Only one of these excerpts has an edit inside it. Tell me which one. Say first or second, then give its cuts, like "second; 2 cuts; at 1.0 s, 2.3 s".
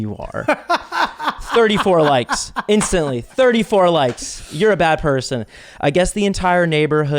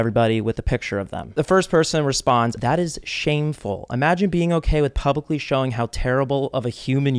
second; 2 cuts; at 1.2 s, 2.6 s